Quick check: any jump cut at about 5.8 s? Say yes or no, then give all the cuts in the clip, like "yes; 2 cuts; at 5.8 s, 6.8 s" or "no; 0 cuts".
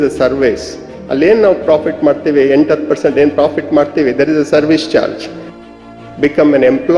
yes; 1 cut; at 5.8 s